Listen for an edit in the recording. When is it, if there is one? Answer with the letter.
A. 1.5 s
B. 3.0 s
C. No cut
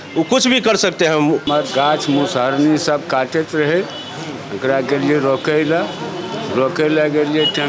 A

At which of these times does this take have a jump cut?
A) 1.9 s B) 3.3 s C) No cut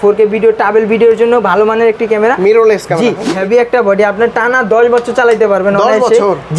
B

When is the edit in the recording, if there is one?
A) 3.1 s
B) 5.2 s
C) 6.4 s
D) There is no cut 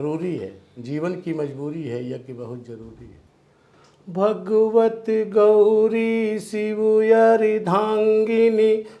A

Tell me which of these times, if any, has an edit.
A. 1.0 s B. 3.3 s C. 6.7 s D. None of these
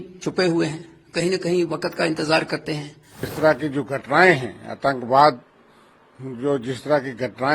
B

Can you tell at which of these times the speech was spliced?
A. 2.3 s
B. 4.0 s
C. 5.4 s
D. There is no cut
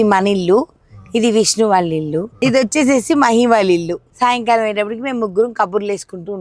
B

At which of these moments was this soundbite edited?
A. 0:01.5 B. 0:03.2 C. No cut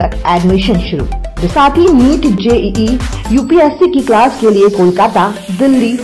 A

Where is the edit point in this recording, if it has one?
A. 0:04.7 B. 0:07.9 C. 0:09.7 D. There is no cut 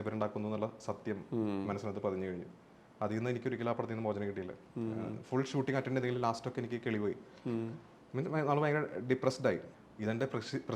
C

